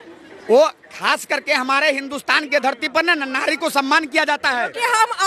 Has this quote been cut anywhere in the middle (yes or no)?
no